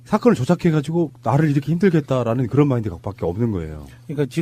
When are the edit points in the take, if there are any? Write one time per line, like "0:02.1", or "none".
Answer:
0:01.7

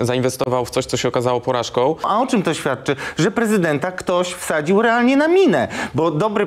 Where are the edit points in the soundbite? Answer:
0:02.1

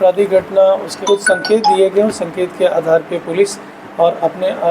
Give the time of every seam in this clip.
0:00.9

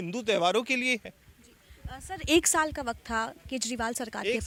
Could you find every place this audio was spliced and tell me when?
none

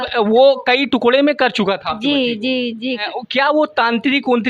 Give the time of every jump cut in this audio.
0:03.0

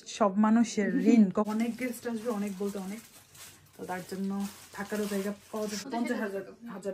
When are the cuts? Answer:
0:01.5
0:05.9

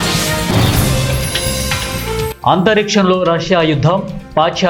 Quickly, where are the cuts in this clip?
none

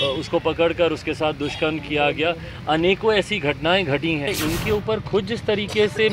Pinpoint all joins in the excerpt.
0:04.3

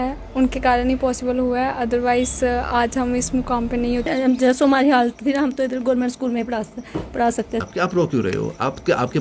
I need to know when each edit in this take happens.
0:04.1
0:07.6

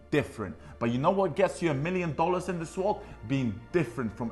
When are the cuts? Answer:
none

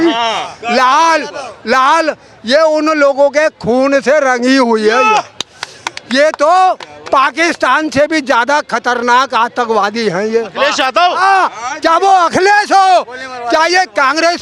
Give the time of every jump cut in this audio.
none

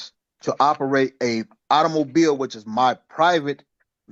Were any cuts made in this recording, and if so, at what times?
none

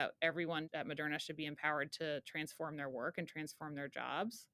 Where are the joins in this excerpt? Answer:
none

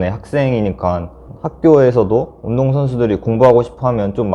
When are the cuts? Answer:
0:01.2

